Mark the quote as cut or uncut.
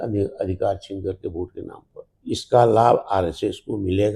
cut